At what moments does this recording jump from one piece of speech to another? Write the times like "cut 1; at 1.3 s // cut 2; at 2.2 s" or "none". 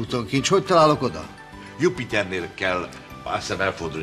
cut 1; at 1.3 s